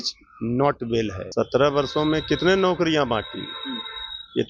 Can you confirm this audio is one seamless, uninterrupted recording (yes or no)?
no